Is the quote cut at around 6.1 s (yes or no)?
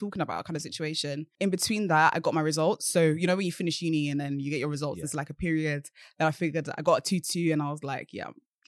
no